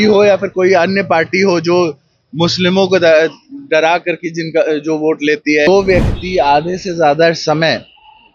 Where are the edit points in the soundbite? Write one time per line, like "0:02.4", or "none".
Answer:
0:05.7